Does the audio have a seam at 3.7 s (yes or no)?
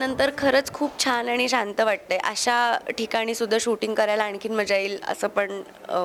no